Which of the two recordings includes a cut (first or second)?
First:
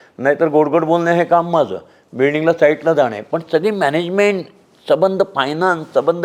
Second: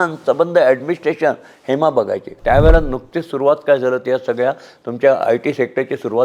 second